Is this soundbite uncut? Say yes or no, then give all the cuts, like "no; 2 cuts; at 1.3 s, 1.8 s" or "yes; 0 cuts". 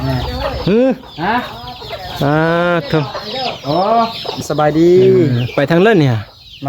no; 1 cut; at 4.3 s